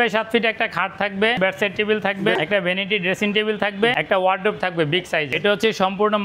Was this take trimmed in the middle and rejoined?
yes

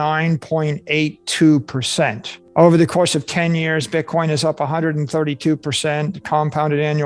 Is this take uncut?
yes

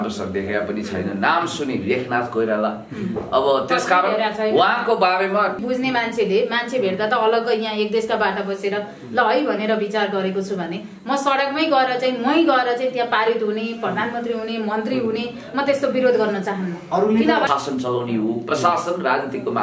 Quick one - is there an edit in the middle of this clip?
yes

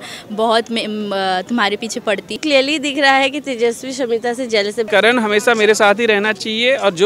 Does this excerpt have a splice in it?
yes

